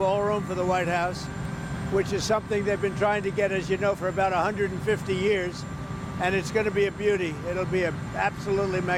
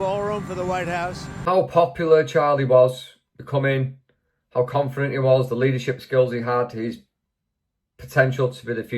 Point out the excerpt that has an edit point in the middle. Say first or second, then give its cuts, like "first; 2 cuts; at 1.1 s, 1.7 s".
second; 1 cut; at 1.3 s